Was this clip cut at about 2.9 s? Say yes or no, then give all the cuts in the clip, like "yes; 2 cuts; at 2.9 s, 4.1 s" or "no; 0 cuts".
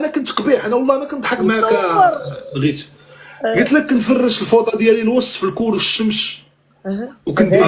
no; 0 cuts